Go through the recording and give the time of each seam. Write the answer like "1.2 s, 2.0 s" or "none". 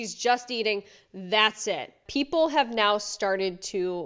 1.9 s